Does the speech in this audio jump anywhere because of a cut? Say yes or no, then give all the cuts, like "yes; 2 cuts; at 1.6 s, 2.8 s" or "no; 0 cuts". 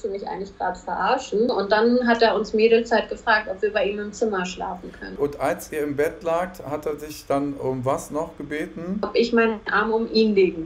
yes; 3 cuts; at 1.5 s, 5.1 s, 9.1 s